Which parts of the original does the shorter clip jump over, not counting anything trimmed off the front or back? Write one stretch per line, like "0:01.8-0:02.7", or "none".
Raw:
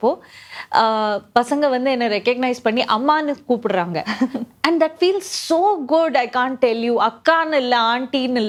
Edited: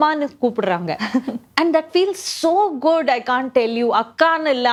none